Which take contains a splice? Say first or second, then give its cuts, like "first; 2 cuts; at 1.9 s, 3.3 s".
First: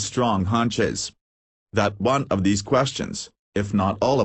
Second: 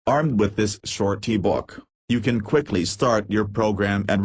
first; 1 cut; at 2.4 s